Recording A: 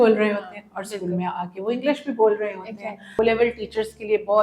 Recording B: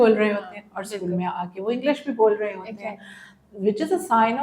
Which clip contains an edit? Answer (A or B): A